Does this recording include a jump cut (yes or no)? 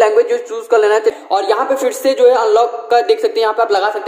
yes